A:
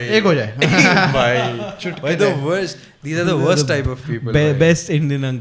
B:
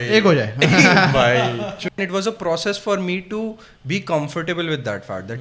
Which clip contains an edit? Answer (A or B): B